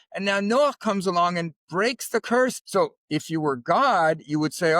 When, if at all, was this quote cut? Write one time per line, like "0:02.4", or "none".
0:02.6